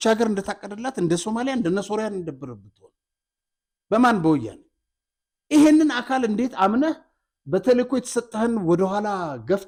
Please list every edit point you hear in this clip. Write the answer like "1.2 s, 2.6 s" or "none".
none